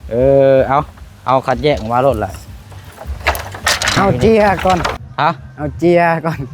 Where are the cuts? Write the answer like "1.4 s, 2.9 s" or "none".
4.0 s

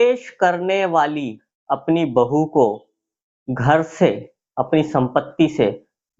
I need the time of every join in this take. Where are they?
none

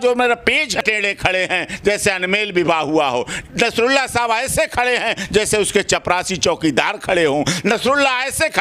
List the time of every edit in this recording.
1.1 s

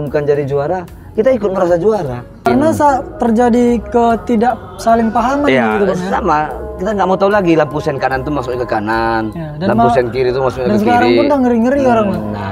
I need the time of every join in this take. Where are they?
2.5 s

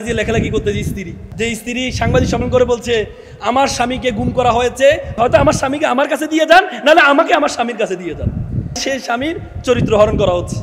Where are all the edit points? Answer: 1.2 s, 5.1 s, 8.8 s

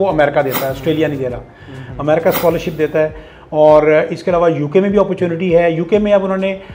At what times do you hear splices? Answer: none

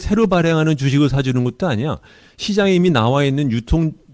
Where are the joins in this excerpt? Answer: 2.0 s

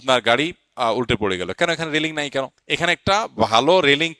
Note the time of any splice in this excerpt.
2.6 s

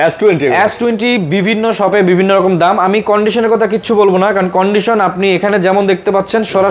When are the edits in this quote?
none

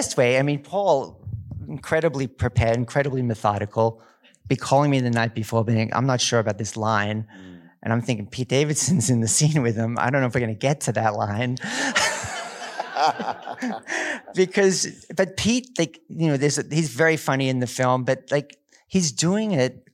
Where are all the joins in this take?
none

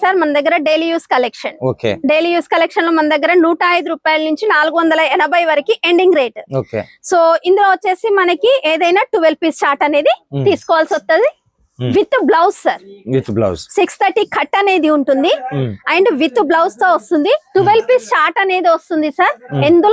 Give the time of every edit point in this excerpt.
none

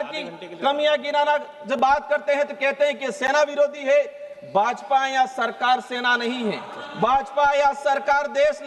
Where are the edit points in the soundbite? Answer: none

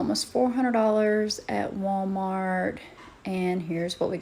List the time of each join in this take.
none

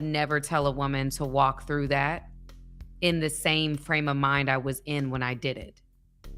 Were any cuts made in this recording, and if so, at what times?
2.5 s

